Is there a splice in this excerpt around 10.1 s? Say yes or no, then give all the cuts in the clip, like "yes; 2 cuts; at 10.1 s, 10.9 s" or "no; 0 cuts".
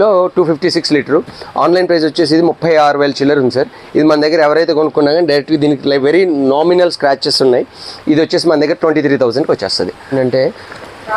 yes; 1 cut; at 10.1 s